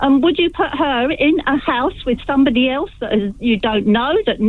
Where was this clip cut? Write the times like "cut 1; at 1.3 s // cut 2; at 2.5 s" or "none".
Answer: none